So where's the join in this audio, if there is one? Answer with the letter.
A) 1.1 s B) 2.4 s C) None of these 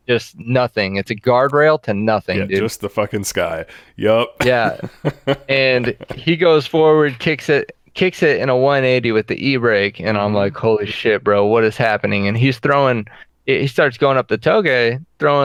C